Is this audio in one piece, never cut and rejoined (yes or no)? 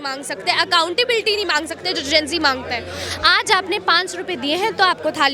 yes